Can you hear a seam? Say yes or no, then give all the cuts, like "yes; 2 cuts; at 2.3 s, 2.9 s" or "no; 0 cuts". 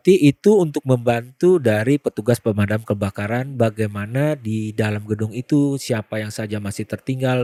no; 0 cuts